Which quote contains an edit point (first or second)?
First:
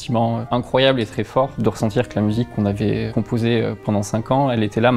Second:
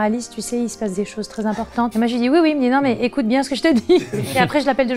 first